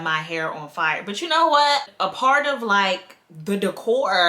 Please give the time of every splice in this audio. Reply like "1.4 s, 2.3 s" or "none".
1.9 s